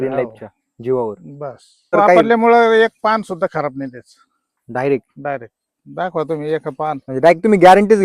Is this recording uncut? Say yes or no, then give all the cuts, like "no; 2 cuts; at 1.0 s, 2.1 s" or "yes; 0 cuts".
no; 2 cuts; at 1.9 s, 7.0 s